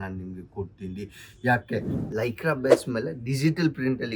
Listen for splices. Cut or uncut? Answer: cut